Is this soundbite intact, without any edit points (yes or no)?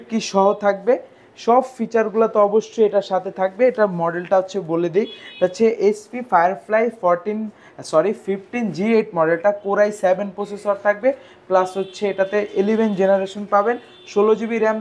yes